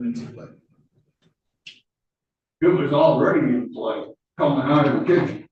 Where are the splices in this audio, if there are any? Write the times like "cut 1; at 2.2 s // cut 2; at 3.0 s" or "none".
none